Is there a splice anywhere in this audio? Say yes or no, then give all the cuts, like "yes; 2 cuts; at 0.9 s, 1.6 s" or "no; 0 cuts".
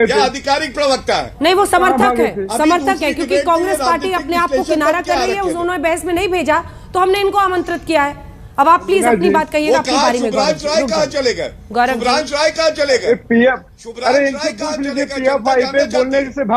no; 0 cuts